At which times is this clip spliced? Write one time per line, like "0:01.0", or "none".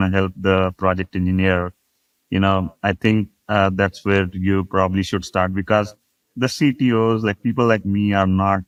none